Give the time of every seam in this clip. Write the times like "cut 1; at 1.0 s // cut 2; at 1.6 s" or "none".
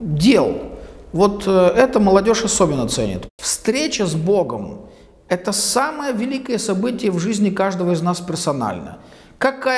cut 1; at 3.2 s